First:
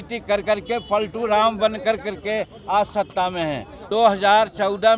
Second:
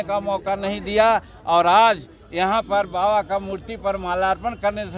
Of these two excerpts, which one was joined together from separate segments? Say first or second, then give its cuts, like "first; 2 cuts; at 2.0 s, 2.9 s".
first; 1 cut; at 3.8 s